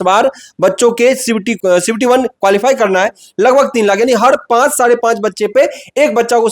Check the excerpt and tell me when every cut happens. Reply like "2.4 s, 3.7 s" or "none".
1.5 s

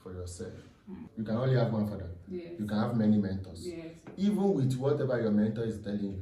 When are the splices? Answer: 1.0 s

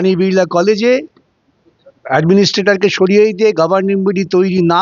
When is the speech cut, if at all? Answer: none

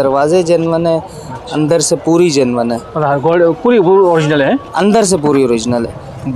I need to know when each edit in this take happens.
none

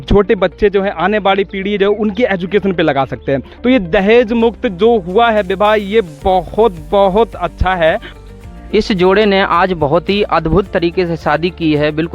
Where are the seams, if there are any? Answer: 8.2 s

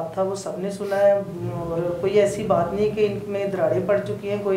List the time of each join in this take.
none

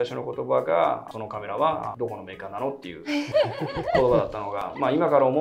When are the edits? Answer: none

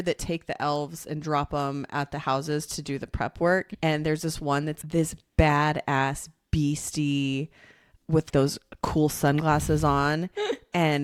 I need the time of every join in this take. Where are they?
none

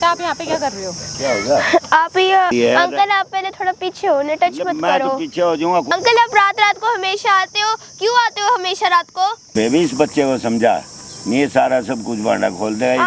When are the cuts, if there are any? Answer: 2.5 s, 5.9 s, 9.5 s

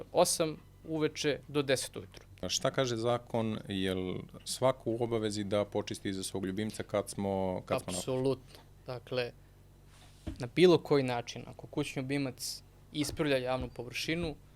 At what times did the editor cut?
2.5 s

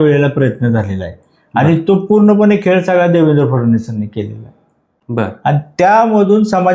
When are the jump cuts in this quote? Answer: none

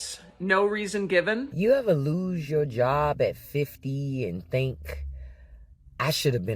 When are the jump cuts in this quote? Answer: 1.5 s

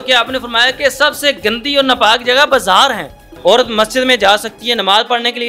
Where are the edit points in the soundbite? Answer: 3.2 s

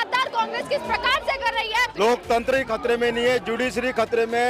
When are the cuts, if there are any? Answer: 1.9 s

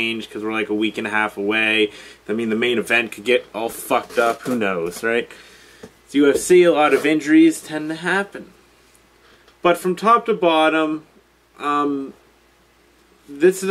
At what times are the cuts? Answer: none

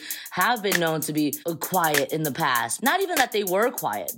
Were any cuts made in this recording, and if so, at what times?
1.4 s, 2.7 s

